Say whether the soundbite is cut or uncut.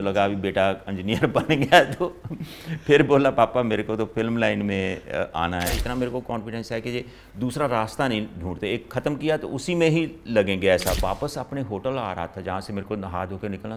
cut